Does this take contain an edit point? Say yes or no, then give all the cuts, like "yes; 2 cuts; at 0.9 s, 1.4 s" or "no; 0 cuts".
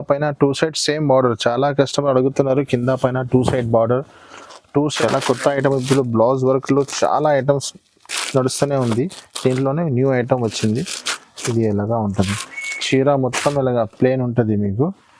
yes; 1 cut; at 4.9 s